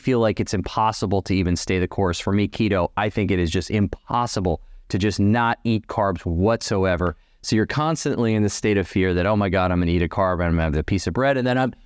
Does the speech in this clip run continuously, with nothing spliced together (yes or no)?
yes